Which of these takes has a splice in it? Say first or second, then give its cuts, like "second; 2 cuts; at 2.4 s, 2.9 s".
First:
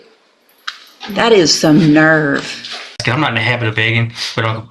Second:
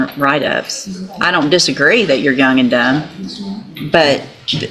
first; 1 cut; at 3.0 s